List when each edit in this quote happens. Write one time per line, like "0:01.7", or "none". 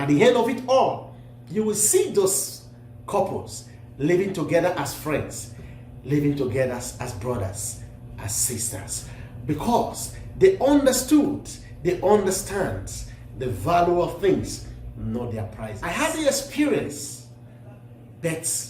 0:15.8

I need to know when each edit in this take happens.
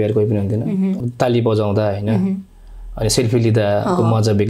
0:01.0

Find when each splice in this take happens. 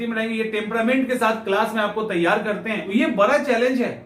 0:02.8

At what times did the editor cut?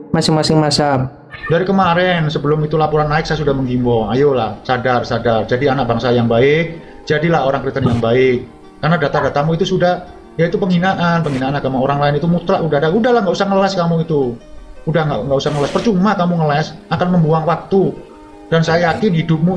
0:01.4

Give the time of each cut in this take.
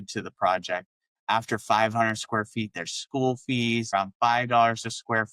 0:03.9

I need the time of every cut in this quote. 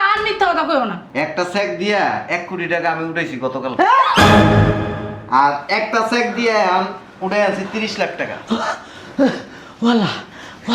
0:01.0

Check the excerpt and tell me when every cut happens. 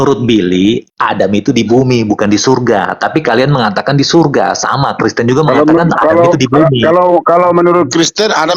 0:00.9

